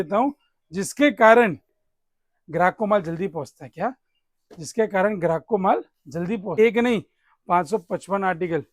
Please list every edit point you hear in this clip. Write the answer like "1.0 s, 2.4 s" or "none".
6.5 s